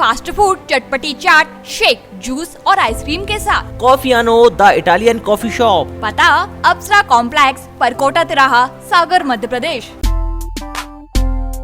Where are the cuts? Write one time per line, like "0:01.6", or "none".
0:09.9